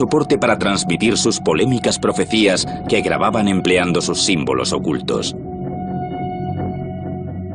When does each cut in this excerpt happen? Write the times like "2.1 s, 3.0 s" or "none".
5.2 s